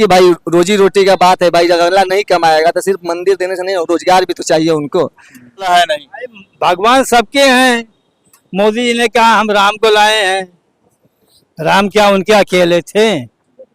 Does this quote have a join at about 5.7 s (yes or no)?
yes